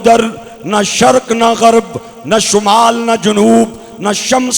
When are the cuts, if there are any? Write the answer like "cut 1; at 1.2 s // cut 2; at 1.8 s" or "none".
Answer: none

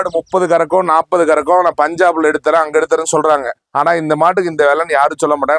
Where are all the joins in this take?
none

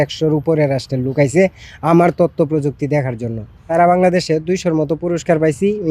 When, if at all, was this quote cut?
cut 1; at 3.7 s

